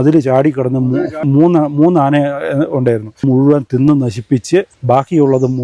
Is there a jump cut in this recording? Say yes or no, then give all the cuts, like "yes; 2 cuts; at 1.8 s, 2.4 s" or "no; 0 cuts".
yes; 3 cuts; at 1.2 s, 3.2 s, 4.8 s